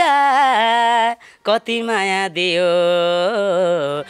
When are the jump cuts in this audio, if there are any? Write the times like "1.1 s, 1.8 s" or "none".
none

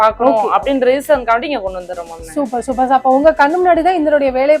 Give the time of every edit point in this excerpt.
none

